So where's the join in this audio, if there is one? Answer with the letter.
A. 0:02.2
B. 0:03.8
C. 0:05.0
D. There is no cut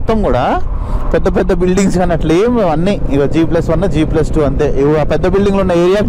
D